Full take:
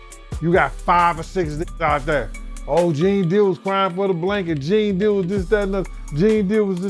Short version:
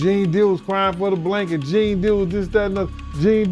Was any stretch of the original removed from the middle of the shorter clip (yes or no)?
no